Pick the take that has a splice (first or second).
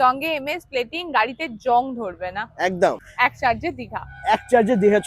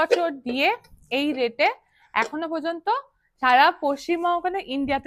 first